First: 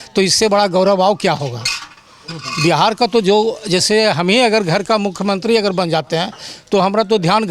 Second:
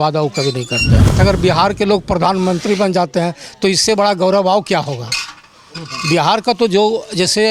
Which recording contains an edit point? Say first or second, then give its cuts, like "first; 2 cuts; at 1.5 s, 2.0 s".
second; 1 cut; at 1.1 s